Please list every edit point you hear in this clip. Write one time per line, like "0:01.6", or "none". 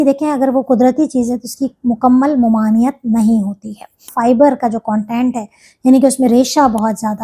0:04.0